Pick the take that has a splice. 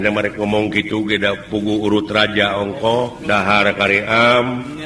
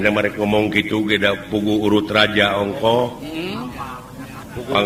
first; 1 cut; at 3.2 s

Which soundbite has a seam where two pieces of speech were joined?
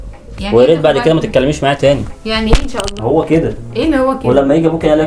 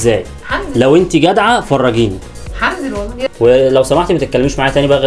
second; 1 cut; at 3.2 s

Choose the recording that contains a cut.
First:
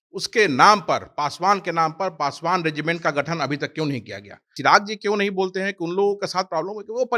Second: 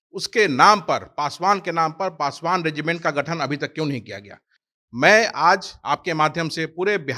first; 1 cut; at 4.5 s

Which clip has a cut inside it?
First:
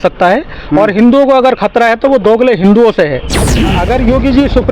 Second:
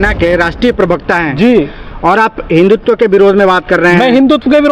first; 1 cut; at 3.5 s

